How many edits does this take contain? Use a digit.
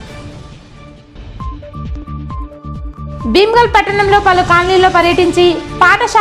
1